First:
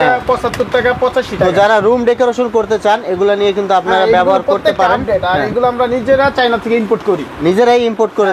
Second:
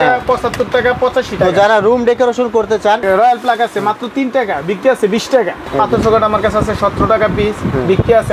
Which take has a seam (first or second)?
second